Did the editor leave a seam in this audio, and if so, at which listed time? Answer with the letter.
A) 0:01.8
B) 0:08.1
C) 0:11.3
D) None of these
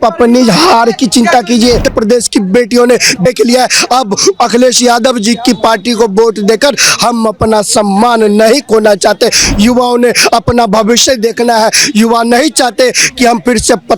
A